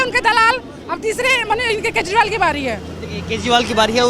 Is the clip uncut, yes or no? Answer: yes